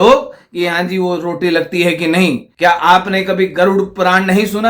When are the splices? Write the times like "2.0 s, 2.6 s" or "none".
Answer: 2.5 s